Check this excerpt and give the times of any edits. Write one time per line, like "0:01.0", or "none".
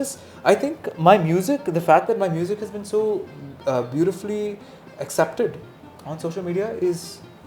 none